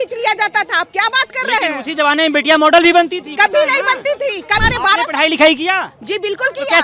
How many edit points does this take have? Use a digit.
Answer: 1